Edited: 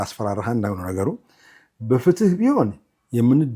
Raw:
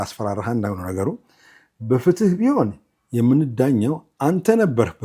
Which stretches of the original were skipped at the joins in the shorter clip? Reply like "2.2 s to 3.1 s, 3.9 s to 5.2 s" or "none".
none